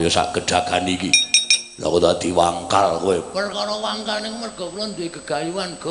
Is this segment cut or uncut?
uncut